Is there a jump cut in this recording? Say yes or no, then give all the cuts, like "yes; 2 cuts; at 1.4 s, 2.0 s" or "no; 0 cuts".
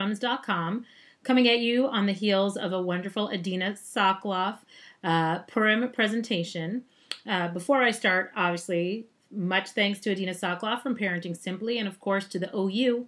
no; 0 cuts